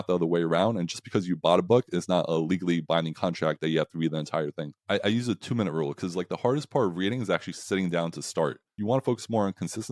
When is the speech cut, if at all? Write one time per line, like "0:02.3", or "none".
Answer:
0:04.8
0:08.7